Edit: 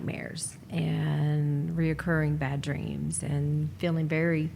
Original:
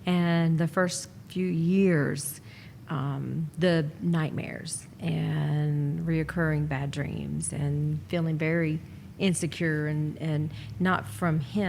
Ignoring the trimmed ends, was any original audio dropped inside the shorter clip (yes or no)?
no